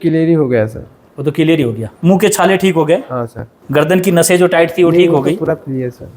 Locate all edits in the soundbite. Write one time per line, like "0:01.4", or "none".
0:01.9
0:03.6